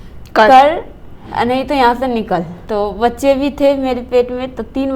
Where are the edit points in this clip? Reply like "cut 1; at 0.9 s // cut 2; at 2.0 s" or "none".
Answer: cut 1; at 2.6 s